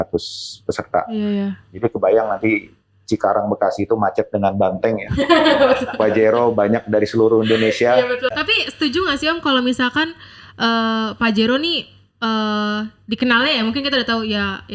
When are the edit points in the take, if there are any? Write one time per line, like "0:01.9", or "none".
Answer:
0:08.3